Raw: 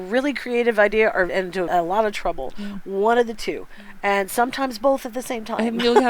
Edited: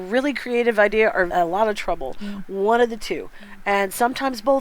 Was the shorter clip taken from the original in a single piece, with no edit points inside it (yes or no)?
no